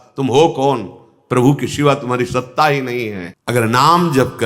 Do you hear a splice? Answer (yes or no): yes